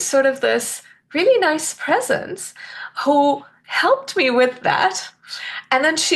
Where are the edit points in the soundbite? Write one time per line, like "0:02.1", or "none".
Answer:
none